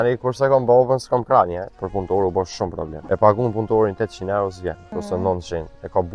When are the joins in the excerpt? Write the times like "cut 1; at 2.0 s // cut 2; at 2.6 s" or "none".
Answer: cut 1; at 1.8 s // cut 2; at 2.9 s // cut 3; at 4.9 s